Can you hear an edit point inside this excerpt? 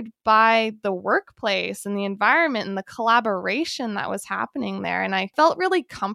no; 0 cuts

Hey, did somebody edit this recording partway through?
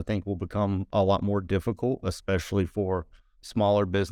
no; 0 cuts

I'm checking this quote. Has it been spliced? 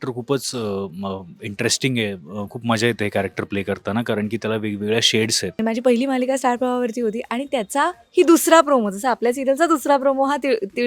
yes; 1 cut; at 5.6 s

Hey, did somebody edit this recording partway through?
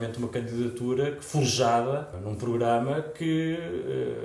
yes; 1 cut; at 2.2 s

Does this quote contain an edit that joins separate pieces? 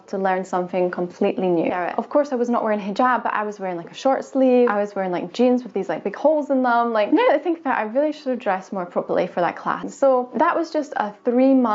yes; 2 cuts; at 1.7 s, 9.9 s

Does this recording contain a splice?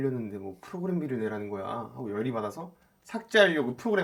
no; 0 cuts

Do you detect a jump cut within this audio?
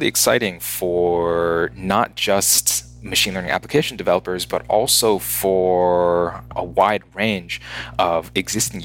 no; 0 cuts

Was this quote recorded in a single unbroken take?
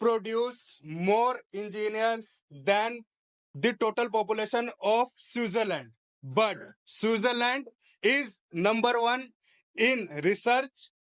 yes; 0 cuts

